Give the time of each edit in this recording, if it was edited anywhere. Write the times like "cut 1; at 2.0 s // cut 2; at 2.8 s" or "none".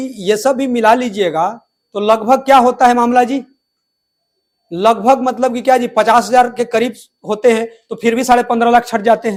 none

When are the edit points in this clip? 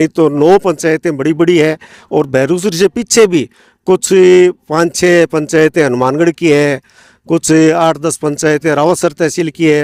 none

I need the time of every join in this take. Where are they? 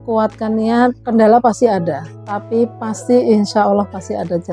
cut 1; at 1.0 s

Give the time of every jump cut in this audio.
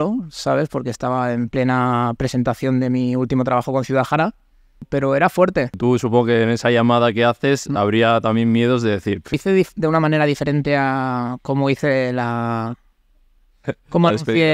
cut 1; at 4.8 s // cut 2; at 5.8 s // cut 3; at 9.4 s

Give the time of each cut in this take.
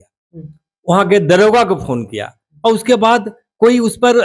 none

